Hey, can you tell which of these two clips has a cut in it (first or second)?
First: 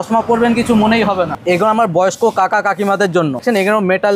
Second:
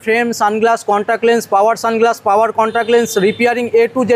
first